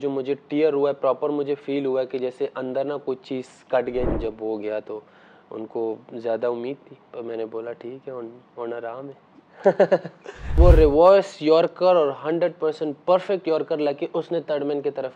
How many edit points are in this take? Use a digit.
2